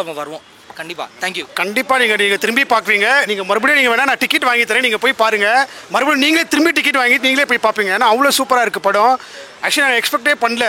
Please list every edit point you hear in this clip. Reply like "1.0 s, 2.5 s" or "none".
none

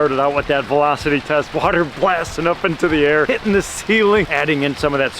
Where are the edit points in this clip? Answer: 4.3 s

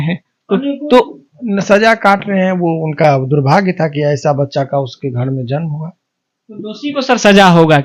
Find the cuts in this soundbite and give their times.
none

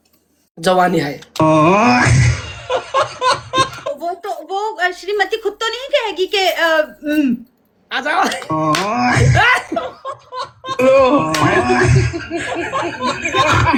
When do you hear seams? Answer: none

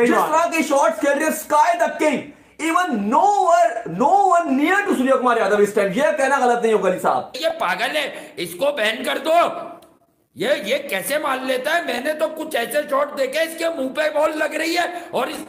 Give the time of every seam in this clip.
7.4 s

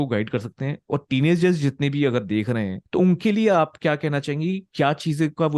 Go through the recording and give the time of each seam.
2.8 s

